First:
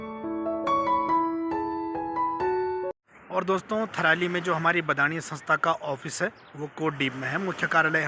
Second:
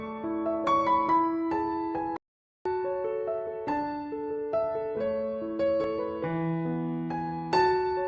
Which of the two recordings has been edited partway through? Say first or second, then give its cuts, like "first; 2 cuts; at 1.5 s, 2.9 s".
first; 2 cuts; at 2.1 s, 2.9 s